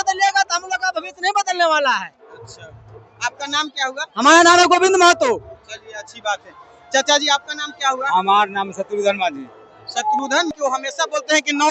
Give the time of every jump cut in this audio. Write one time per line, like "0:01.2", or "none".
0:10.5

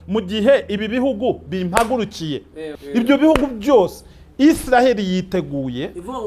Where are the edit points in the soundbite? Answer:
0:03.0

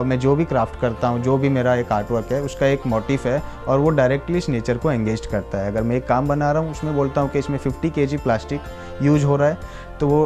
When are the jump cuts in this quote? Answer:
none

